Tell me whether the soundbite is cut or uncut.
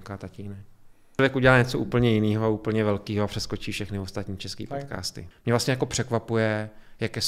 cut